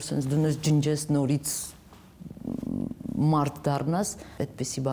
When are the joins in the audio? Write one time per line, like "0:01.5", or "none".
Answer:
none